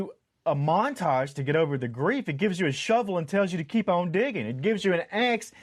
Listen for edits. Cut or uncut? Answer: uncut